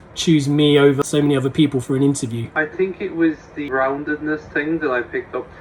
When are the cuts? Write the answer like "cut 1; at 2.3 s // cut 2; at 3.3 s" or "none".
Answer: cut 1; at 2.5 s // cut 2; at 3.7 s